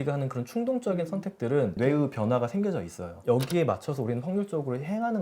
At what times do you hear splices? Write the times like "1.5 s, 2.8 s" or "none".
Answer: 1.8 s, 3.2 s